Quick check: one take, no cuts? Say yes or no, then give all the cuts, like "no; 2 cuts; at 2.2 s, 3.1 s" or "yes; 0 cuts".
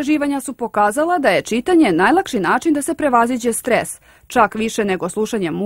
yes; 0 cuts